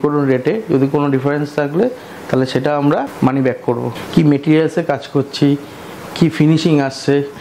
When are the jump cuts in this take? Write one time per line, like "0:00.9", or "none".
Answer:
0:03.1
0:03.9